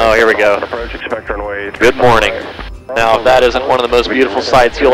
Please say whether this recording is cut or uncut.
cut